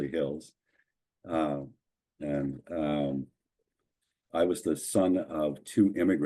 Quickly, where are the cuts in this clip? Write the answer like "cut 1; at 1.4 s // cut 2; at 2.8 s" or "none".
none